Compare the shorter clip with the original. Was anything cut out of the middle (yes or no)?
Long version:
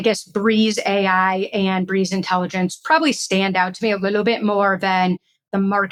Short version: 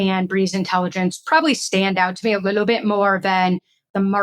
no